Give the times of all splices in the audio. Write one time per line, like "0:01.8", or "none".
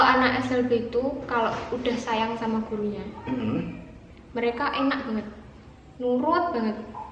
none

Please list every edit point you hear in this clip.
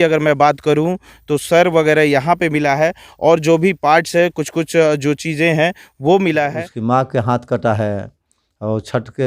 0:06.7

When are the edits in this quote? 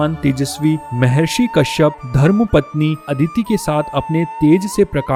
none

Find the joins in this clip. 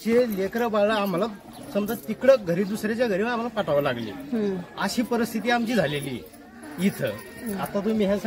none

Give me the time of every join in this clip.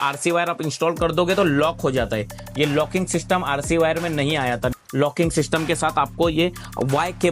0:04.7

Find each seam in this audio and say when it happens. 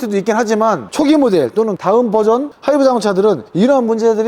none

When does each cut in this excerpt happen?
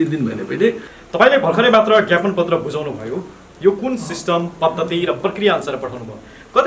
0:00.9

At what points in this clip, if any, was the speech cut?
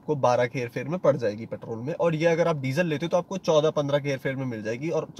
none

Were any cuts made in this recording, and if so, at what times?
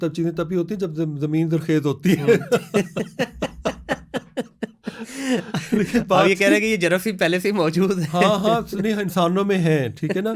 none

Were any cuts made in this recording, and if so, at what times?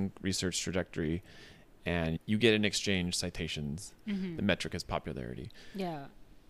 0:02.2

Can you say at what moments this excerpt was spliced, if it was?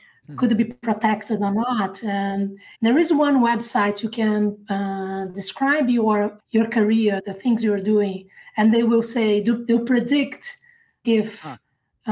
0:02.6
0:06.4
0:07.3
0:11.0

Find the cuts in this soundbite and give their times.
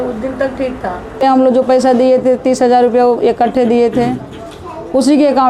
0:01.2

